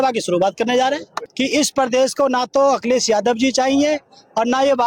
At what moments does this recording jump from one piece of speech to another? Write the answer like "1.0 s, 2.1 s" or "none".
1.2 s